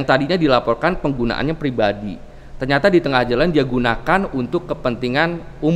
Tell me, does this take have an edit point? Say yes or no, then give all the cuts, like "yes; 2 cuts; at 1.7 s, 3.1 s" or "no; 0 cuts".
no; 0 cuts